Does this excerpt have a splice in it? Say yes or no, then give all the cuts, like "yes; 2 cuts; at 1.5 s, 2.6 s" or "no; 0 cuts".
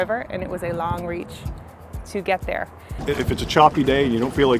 yes; 1 cut; at 3.0 s